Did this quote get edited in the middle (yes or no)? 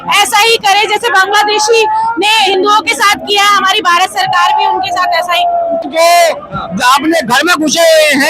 yes